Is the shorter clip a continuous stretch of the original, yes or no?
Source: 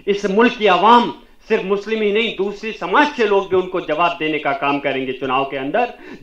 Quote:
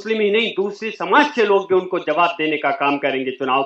yes